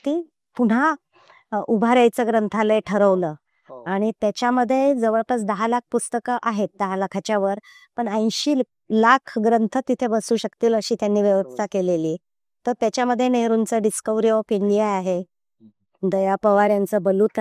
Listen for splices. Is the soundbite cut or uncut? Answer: uncut